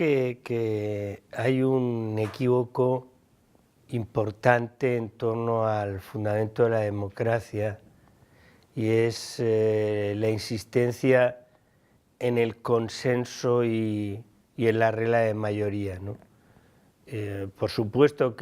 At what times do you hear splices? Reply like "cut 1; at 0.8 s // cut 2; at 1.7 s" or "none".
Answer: cut 1; at 1.2 s